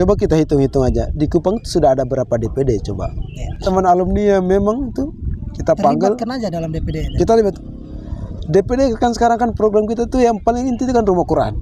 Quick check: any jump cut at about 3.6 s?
yes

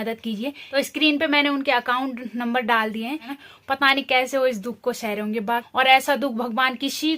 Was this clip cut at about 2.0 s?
no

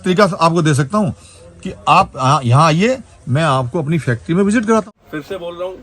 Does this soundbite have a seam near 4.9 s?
yes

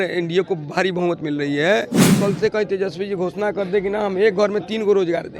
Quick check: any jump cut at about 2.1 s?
yes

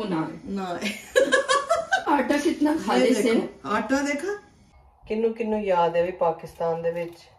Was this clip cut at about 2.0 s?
yes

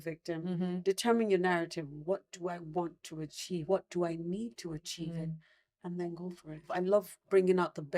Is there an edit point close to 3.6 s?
yes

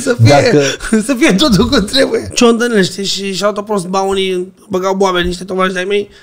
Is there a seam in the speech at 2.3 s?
yes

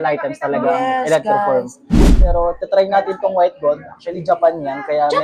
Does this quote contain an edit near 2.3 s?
yes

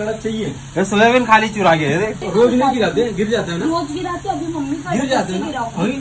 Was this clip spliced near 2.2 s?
yes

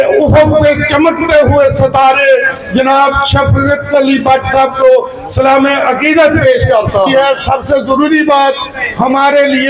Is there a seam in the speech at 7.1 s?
yes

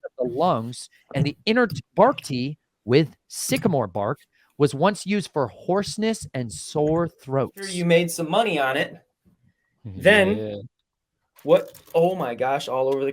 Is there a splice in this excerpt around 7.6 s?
yes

